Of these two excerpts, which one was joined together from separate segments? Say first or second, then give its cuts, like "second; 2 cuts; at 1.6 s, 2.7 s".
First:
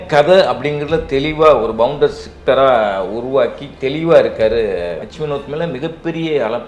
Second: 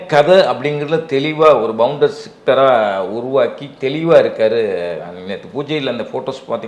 first; 1 cut; at 5.1 s